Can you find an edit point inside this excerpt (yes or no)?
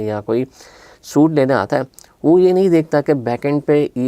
no